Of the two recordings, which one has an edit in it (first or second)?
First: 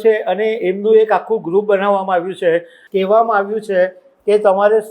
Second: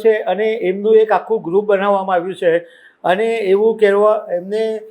first